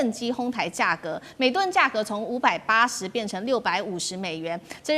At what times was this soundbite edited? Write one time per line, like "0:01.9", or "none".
none